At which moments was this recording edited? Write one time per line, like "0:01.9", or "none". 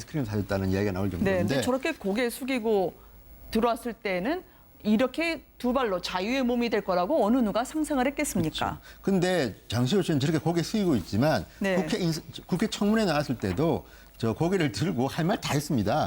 0:13.6